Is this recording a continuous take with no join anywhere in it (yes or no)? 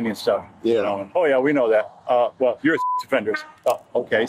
yes